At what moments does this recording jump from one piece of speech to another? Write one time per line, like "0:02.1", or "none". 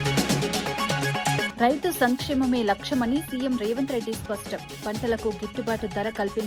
0:01.5